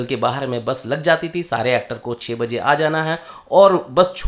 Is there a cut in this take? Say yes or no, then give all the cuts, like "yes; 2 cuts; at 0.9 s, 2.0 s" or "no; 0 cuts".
no; 0 cuts